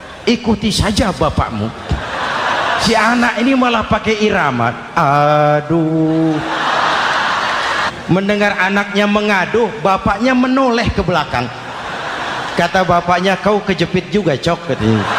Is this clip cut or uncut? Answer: cut